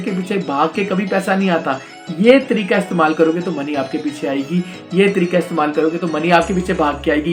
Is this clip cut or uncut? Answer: uncut